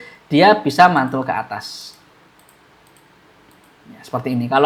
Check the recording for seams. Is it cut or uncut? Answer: uncut